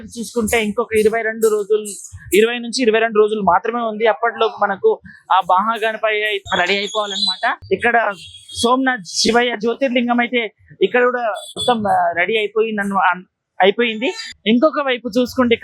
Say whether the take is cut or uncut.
cut